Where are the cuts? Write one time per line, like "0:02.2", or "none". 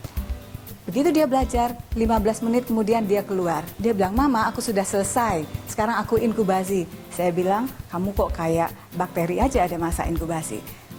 none